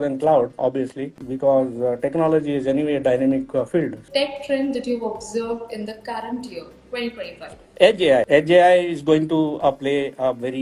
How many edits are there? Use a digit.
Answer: 1